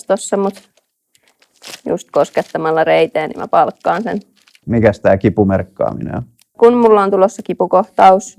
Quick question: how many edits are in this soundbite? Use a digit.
2